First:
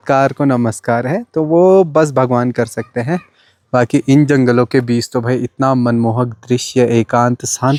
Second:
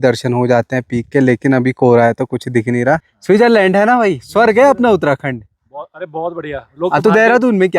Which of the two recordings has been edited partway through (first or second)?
second